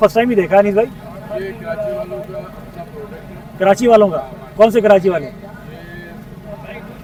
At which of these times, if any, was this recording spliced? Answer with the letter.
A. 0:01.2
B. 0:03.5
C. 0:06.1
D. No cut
D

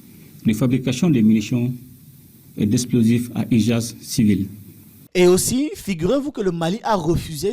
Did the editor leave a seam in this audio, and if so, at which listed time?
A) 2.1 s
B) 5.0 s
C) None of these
B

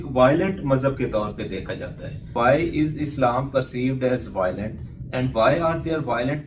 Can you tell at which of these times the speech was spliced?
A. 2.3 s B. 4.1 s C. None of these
A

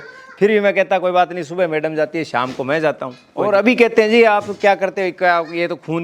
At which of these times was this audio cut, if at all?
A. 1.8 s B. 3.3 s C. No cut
B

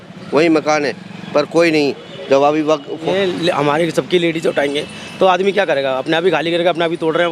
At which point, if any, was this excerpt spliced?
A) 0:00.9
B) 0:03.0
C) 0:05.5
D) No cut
B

